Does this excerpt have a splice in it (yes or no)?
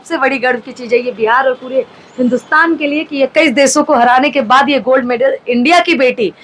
no